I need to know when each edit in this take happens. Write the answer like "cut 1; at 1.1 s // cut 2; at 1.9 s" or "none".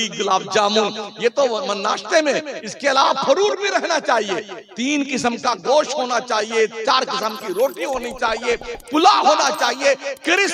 none